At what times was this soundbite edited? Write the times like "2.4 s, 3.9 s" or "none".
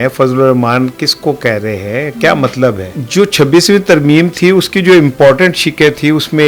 2.9 s

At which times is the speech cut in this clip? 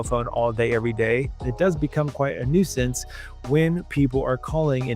1.4 s

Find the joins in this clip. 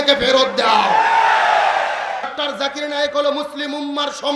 2.3 s

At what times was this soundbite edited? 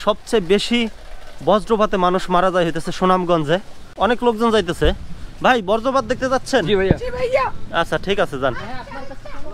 3.8 s

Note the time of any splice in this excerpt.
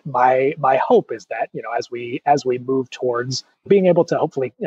3.6 s

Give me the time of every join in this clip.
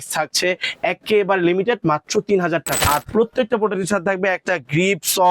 2.8 s

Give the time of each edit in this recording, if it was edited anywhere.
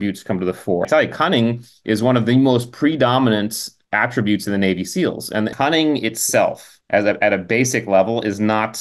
0.9 s, 5.5 s

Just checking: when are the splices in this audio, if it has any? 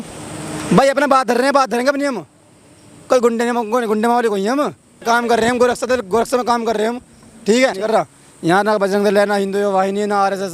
5.0 s, 7.8 s

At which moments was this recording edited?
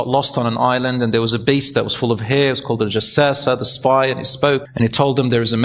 4.7 s

